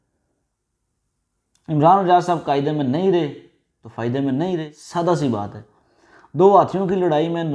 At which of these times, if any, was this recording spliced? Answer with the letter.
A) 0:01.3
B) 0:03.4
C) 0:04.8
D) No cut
C